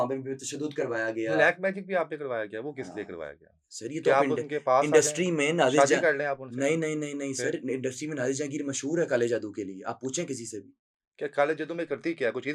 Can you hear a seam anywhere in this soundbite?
no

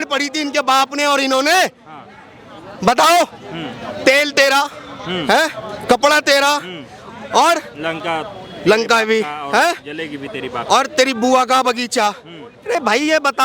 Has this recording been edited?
no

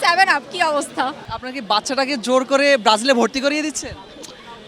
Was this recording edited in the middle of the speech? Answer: yes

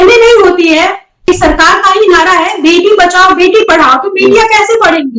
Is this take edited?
yes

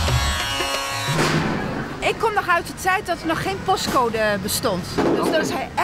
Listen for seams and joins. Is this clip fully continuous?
yes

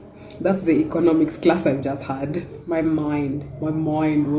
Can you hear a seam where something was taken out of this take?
yes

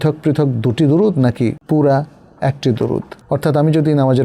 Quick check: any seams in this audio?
yes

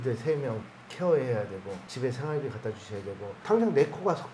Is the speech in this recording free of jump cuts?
yes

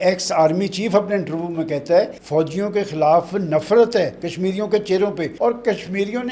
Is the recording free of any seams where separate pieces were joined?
no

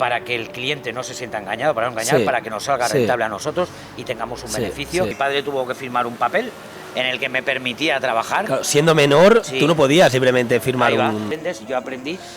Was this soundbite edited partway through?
yes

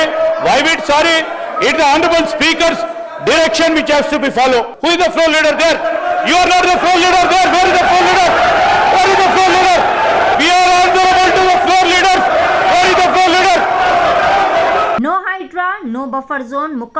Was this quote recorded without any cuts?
no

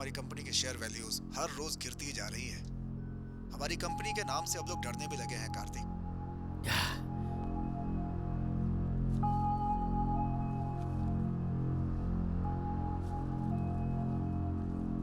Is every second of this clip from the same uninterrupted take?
no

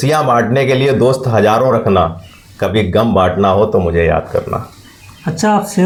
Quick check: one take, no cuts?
yes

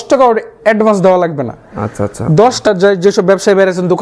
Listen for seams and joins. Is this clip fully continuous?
no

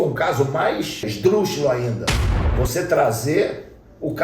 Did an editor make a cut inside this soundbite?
yes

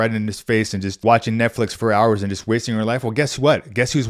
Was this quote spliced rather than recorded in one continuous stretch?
yes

